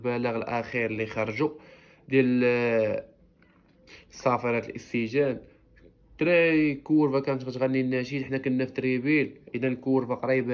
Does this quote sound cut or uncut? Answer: uncut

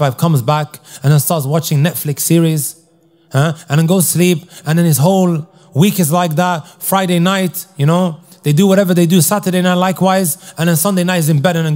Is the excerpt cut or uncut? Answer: uncut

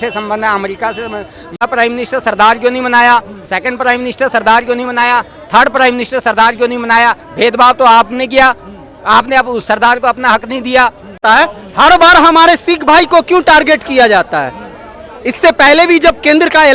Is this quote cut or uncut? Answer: cut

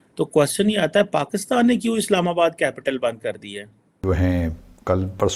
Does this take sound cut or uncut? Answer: uncut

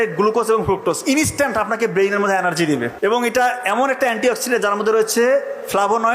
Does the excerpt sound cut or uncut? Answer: cut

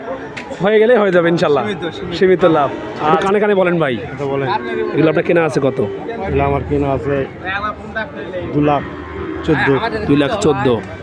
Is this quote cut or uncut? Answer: cut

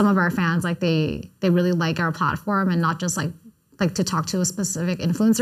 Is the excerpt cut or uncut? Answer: uncut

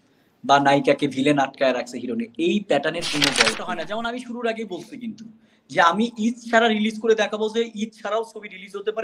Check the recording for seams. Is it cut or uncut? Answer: cut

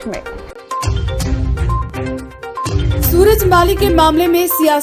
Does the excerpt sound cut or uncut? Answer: uncut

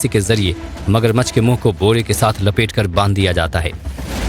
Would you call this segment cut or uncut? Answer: cut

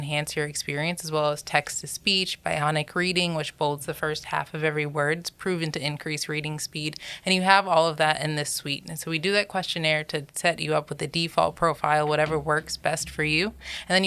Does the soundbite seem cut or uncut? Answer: uncut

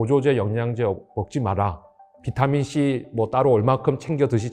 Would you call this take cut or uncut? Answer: uncut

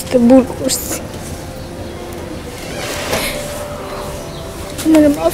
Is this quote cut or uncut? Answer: uncut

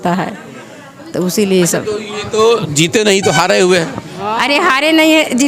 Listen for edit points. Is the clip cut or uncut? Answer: uncut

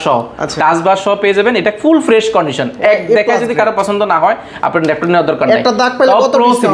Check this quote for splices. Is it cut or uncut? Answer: uncut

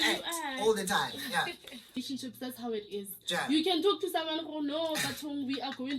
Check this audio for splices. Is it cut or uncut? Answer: cut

